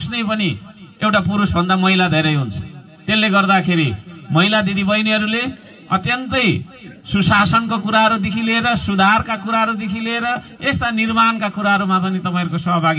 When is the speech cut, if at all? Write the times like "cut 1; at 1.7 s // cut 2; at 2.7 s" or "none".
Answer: none